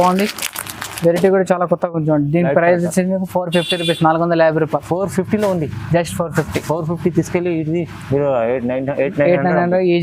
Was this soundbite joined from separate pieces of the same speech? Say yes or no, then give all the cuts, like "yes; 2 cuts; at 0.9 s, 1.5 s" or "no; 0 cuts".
no; 0 cuts